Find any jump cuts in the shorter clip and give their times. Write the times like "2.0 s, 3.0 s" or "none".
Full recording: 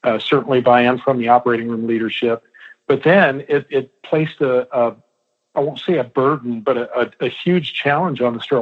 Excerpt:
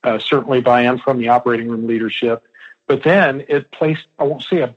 3.7 s